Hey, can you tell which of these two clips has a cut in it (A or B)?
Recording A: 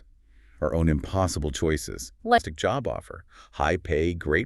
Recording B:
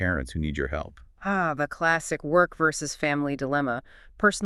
A